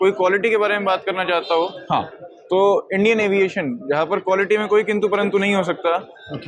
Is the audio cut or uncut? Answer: uncut